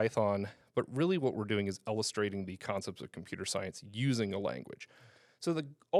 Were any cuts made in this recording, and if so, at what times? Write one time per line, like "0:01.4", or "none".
none